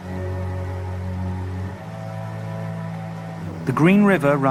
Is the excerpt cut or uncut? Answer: uncut